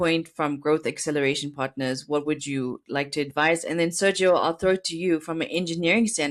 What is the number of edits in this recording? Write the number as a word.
zero